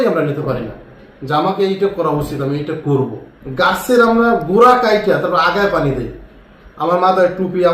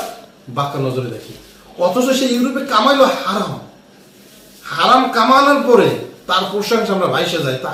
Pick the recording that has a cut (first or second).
first